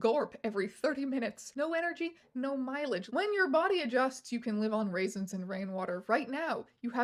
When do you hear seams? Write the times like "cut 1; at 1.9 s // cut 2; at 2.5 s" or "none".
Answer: cut 1; at 1.4 s // cut 2; at 3.1 s